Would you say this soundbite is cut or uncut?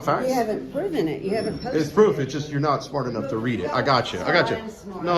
uncut